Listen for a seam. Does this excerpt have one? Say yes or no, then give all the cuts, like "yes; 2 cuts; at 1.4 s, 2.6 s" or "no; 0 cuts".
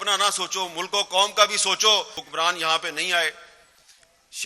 yes; 1 cut; at 2.2 s